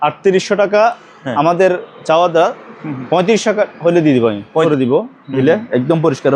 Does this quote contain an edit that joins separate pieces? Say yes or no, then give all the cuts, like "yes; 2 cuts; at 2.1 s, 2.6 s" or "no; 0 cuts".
yes; 1 cut; at 4.7 s